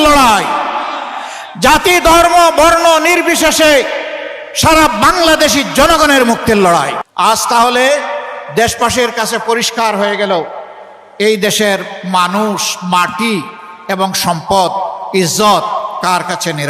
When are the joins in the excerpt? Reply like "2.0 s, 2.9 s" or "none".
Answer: 7.0 s